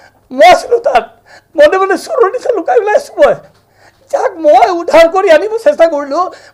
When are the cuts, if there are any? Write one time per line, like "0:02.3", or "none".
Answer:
none